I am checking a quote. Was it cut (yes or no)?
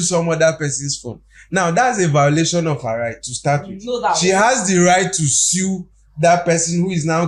no